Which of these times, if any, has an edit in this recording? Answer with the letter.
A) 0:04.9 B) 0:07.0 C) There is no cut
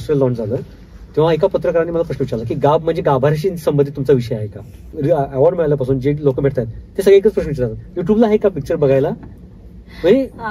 A